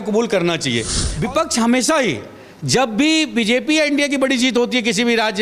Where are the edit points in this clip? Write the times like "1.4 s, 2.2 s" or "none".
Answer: 1.3 s